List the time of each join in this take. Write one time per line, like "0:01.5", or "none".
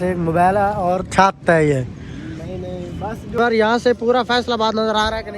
0:03.4